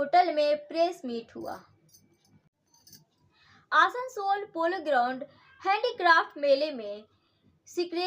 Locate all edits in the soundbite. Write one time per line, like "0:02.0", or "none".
0:02.6